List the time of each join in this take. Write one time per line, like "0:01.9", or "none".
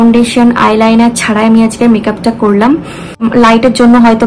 0:03.2

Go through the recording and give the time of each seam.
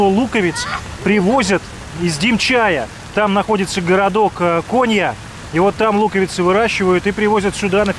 none

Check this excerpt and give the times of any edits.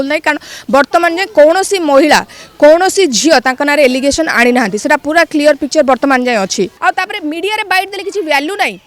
0:06.8

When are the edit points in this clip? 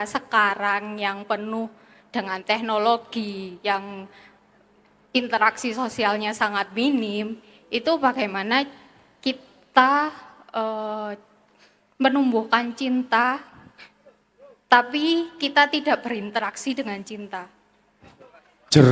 none

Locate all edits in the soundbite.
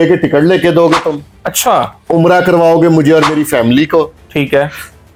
none

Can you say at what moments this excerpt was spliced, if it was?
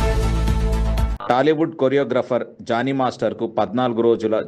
0:01.1

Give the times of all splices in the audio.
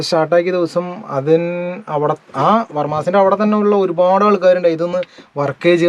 none

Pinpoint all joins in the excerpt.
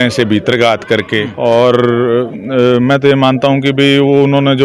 none

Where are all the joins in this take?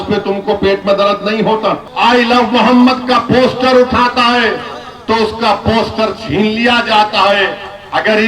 0:01.9

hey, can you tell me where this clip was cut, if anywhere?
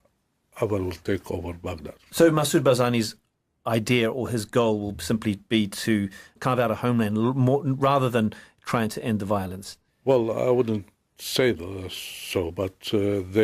0:03.8

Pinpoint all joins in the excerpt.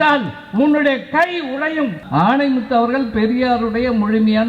0:02.0

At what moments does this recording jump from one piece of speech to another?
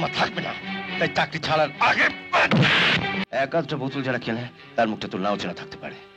0:03.2

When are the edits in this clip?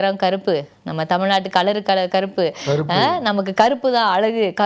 none

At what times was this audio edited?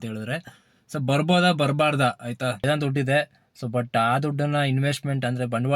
0:02.6

